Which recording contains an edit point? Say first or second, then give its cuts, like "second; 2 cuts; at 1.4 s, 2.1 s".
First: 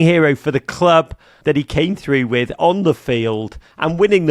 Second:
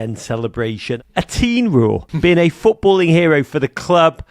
second; 2 cuts; at 0.9 s, 2.1 s